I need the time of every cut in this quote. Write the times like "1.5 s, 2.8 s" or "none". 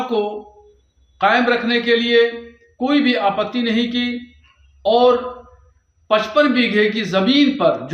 none